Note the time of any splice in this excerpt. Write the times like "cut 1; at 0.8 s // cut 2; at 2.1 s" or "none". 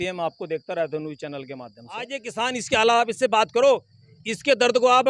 cut 1; at 2.2 s